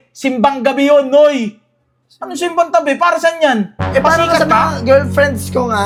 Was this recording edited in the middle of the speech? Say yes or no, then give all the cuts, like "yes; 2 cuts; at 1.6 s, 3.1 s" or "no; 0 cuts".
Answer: no; 0 cuts